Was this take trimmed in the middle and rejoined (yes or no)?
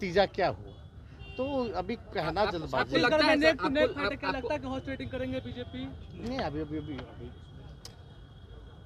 no